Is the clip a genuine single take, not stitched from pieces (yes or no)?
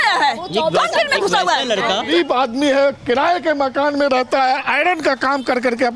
no